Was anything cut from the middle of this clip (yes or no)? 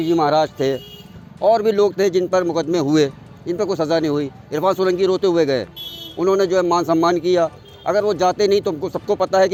no